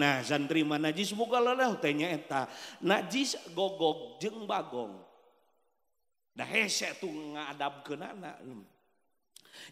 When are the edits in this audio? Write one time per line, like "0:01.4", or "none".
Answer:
none